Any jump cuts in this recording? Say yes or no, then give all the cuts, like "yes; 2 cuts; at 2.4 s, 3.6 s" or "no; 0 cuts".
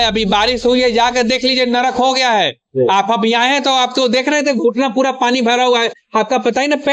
no; 0 cuts